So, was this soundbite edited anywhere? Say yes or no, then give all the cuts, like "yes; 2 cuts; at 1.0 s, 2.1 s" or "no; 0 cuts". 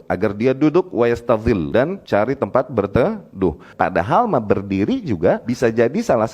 yes; 3 cuts; at 1.8 s, 3.7 s, 5.5 s